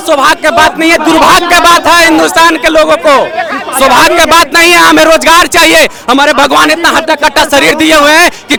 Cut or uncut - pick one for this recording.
uncut